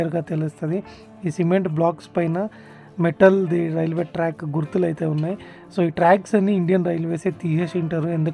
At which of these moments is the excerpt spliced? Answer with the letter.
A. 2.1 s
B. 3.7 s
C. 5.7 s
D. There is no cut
D